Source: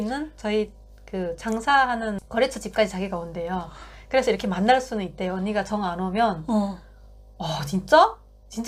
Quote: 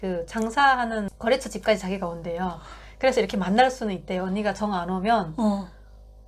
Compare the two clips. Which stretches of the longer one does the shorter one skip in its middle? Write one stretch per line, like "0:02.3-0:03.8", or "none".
none